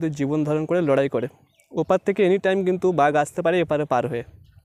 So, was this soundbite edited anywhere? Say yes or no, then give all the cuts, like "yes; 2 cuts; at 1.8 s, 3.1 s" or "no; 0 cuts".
no; 0 cuts